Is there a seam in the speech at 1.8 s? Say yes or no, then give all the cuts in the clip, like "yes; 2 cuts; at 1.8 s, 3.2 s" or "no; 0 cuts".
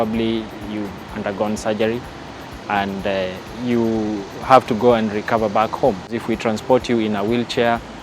no; 2 cuts; at 3.5 s, 6.2 s